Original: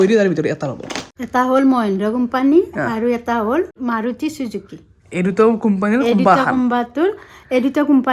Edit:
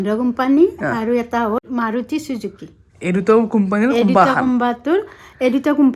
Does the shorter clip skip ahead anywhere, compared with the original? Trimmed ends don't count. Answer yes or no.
yes